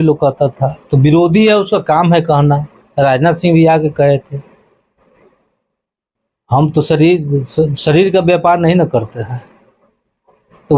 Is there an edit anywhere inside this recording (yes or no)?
no